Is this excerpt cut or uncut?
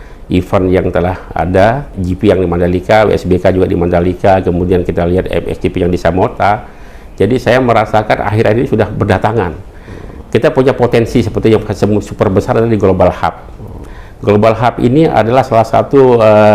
cut